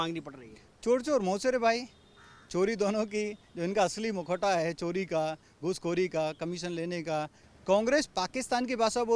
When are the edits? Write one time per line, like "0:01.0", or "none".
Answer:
0:07.4